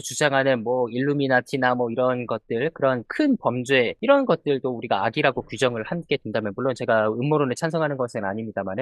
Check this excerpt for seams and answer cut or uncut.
cut